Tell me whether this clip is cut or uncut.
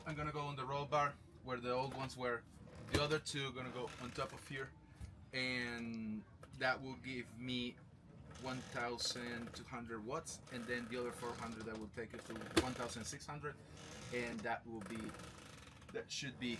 uncut